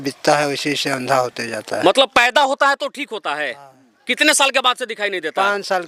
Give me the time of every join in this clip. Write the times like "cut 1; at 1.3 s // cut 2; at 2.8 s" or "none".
none